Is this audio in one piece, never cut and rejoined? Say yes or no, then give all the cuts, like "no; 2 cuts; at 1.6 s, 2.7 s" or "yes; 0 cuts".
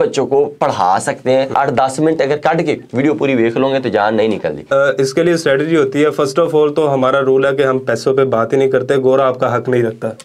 no; 2 cuts; at 1.5 s, 4.6 s